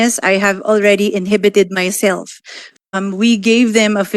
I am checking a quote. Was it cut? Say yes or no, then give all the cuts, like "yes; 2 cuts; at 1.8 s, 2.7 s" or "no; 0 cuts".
yes; 1 cut; at 2.7 s